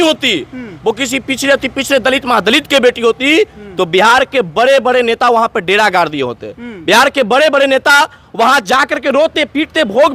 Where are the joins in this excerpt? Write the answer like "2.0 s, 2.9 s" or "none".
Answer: none